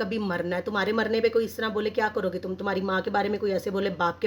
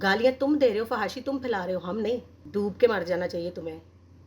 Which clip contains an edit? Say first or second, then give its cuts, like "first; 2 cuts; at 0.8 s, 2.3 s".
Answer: second; 1 cut; at 2.4 s